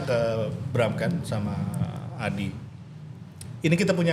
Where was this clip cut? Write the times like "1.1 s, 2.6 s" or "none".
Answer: none

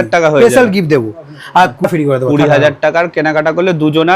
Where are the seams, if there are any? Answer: 1.9 s

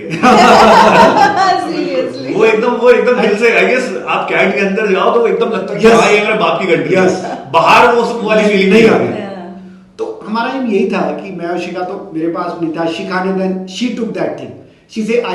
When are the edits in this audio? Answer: none

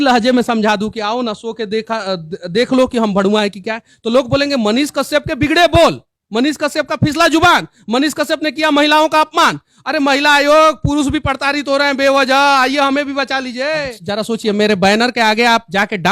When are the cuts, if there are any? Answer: 14.0 s

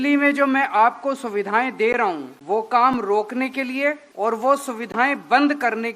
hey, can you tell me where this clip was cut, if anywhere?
2.3 s, 4.1 s

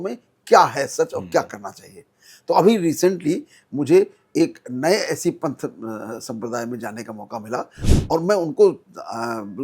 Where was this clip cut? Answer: 7.8 s

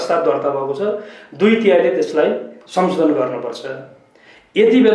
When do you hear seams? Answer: none

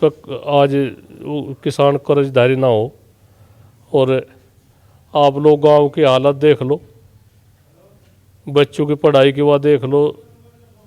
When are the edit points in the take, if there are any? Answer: none

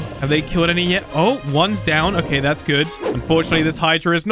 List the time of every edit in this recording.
3.1 s

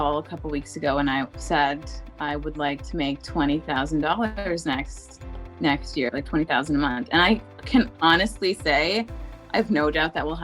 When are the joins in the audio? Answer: none

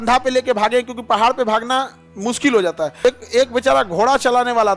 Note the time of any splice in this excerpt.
3.0 s

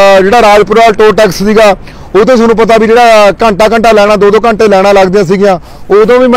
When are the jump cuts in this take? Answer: none

